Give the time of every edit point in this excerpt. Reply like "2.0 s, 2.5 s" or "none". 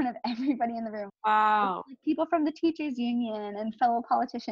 1.1 s